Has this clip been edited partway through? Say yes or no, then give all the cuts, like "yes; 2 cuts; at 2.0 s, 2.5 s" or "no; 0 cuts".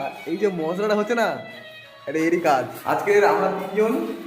yes; 1 cut; at 2.8 s